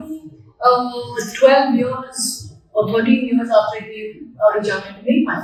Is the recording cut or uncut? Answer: uncut